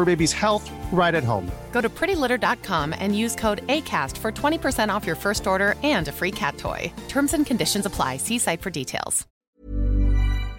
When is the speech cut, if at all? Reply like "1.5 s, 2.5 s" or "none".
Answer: 9.5 s